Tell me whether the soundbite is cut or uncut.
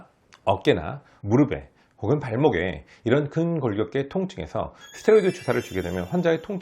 cut